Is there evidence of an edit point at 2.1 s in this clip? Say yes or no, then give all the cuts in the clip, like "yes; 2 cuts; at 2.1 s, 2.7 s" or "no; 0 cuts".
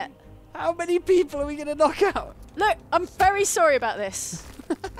yes; 1 cut; at 2.1 s